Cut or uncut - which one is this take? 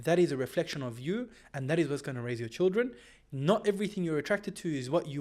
uncut